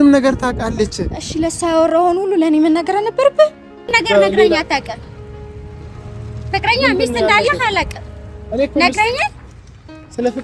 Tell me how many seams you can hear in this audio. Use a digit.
1